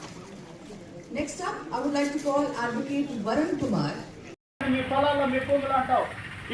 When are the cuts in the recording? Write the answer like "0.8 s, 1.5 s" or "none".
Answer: 4.5 s